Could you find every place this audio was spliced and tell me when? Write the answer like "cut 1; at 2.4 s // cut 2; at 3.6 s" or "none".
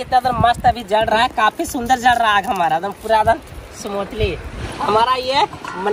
cut 1; at 4.5 s